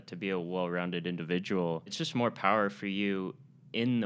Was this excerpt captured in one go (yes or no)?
no